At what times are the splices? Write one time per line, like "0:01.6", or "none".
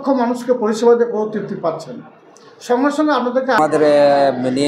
0:03.6

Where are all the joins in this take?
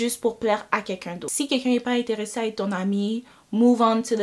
0:01.4

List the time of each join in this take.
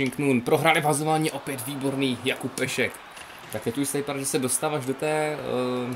none

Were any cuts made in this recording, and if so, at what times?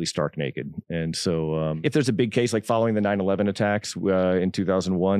0:01.8

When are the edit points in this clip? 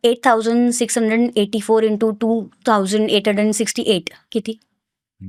none

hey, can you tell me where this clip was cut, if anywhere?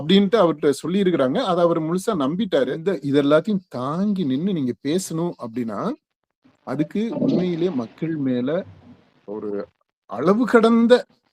0:02.8

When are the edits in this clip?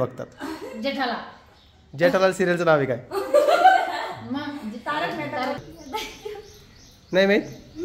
0:05.6

